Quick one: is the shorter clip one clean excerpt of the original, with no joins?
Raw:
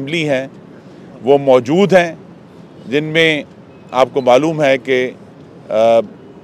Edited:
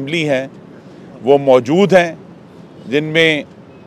yes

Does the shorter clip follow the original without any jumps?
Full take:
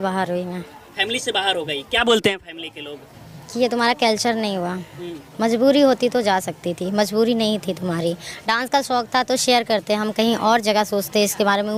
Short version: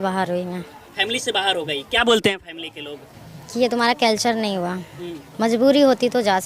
yes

